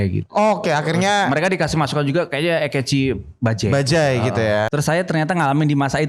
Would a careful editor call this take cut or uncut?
cut